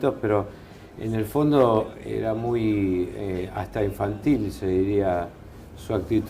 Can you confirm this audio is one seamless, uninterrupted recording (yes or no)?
no